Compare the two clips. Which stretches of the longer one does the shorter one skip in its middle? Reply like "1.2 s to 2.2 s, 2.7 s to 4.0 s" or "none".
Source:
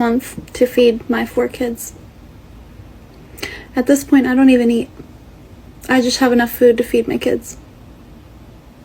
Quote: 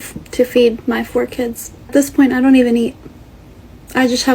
2.1 s to 3.8 s